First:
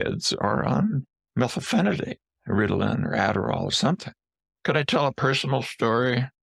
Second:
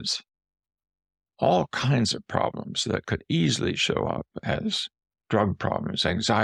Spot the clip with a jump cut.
first; 2 cuts; at 1.2 s, 4.3 s

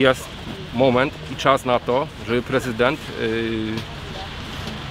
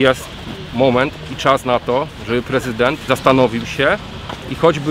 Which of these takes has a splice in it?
second; 1 cut; at 3.1 s

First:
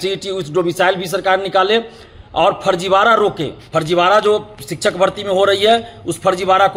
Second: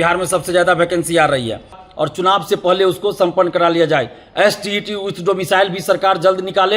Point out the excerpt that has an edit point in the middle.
second; 1 cut; at 1.8 s

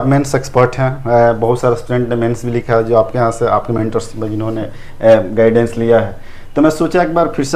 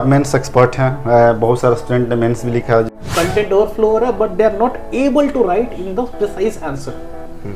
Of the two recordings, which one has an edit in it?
second; 1 cut; at 2.9 s

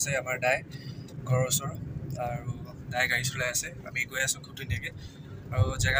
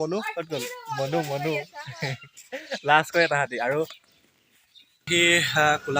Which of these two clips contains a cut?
second; 1 cut; at 5.1 s

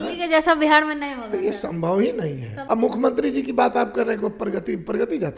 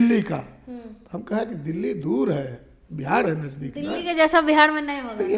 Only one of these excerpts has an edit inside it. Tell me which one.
first; 1 cut; at 2.5 s

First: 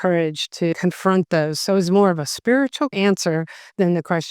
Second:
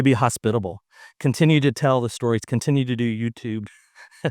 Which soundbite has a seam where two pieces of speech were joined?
first; 2 cuts; at 0.7 s, 2.9 s

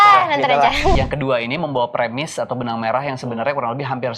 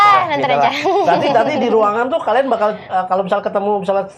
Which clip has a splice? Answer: first; 1 cut; at 0.9 s

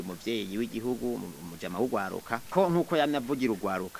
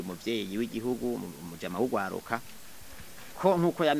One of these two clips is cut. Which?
first; 1 cut; at 2.4 s

